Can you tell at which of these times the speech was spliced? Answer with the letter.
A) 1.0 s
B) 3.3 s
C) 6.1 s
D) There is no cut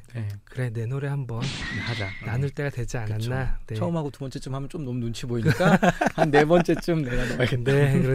D